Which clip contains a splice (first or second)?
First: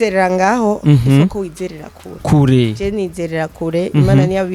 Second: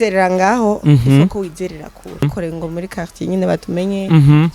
second